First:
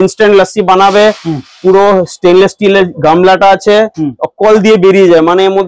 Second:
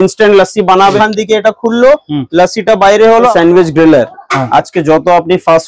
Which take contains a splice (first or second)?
second